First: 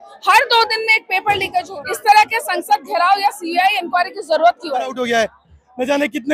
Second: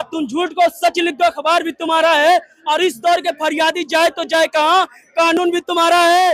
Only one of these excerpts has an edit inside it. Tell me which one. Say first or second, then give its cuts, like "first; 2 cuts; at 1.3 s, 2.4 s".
first; 2 cuts; at 1.7 s, 4.9 s